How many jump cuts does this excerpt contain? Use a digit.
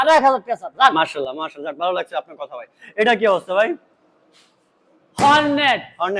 0